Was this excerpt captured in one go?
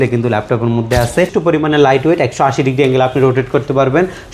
no; 1 cut; at 1.3 s

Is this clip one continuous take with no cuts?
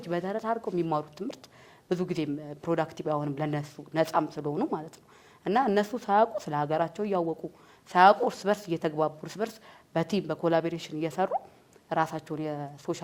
yes; 0 cuts

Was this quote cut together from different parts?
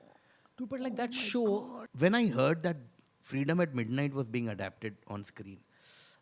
yes; 1 cut; at 1.8 s

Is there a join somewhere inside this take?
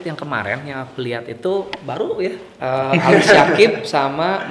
yes; 1 cut; at 2.5 s

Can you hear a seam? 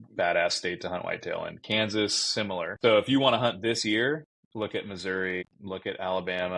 yes; 3 cuts; at 2.7 s, 4.4 s, 5.5 s

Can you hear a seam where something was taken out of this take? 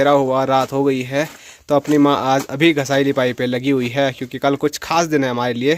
no; 0 cuts

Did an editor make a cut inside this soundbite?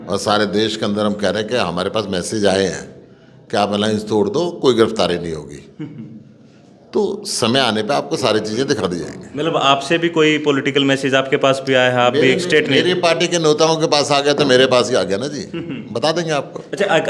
no; 0 cuts

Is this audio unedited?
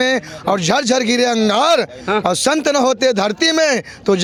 yes; 0 cuts

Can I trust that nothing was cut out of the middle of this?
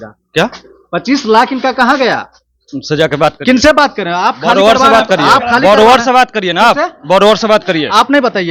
yes; 0 cuts

